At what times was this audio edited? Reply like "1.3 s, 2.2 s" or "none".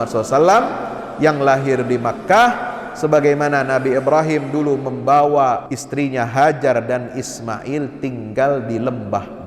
5.8 s